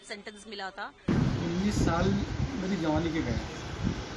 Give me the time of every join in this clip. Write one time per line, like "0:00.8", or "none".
0:01.0